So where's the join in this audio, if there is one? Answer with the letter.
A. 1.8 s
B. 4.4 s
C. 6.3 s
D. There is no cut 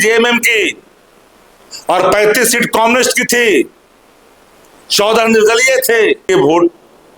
C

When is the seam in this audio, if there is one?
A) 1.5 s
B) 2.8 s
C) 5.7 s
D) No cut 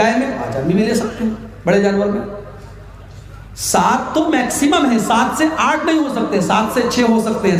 D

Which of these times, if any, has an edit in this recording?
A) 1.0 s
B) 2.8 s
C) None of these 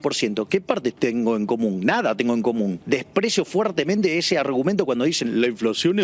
B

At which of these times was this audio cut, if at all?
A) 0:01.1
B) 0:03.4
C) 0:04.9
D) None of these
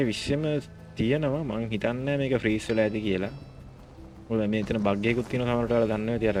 D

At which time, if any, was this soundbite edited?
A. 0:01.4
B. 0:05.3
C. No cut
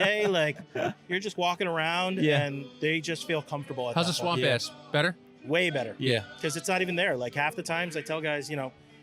C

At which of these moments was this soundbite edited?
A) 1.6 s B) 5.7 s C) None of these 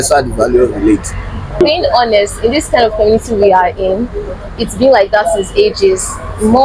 A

